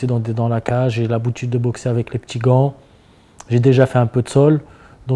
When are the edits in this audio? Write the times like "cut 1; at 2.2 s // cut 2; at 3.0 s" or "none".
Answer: none